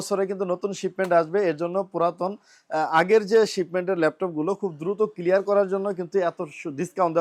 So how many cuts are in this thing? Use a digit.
0